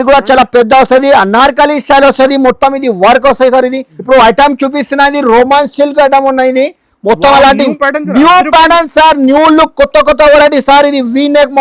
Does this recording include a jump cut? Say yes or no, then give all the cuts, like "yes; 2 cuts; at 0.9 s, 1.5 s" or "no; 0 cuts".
yes; 1 cut; at 3.9 s